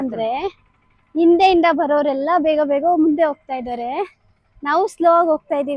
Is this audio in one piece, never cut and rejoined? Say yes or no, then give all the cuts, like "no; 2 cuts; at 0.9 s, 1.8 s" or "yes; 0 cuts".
yes; 0 cuts